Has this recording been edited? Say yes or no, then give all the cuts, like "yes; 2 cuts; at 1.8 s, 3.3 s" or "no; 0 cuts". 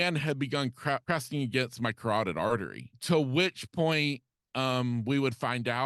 yes; 2 cuts; at 1.0 s, 2.9 s